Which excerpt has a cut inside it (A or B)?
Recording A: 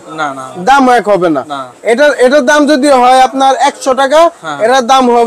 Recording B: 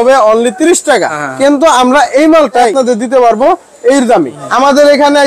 B